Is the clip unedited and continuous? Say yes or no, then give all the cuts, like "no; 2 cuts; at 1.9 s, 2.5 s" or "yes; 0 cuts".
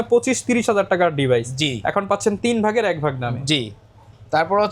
yes; 0 cuts